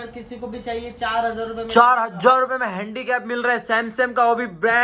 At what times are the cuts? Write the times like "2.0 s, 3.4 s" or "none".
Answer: none

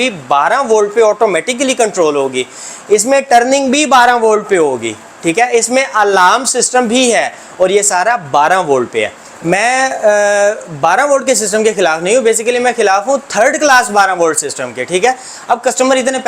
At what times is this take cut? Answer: none

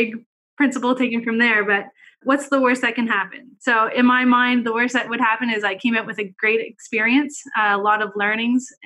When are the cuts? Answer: 1.9 s

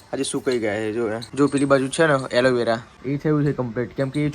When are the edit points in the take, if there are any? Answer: 1.2 s, 2.9 s

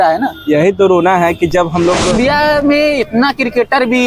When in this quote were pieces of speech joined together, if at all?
2.0 s

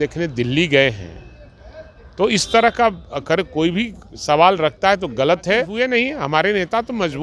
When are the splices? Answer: 5.7 s

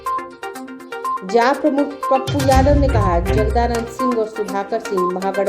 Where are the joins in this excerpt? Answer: none

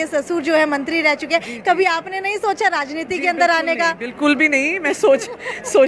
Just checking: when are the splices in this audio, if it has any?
none

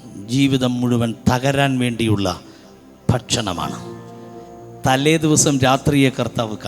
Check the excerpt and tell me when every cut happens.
none

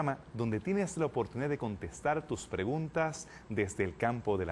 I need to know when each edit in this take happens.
2.7 s

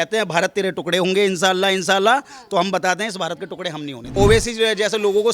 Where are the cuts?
4.0 s

